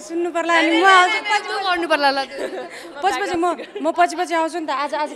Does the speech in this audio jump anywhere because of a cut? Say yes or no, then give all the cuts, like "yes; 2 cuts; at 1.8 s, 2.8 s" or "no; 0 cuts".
no; 0 cuts